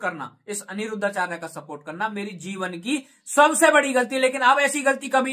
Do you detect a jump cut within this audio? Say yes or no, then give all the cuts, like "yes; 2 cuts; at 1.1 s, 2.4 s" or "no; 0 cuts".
no; 0 cuts